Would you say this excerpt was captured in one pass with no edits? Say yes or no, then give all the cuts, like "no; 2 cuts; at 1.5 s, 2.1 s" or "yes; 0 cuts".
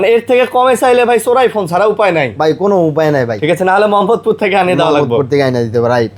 yes; 0 cuts